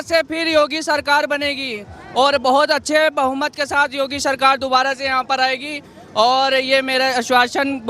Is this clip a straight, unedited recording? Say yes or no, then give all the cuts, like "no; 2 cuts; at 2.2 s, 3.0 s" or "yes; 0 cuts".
yes; 0 cuts